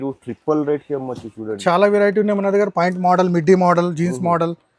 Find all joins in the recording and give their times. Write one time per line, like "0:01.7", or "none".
0:01.6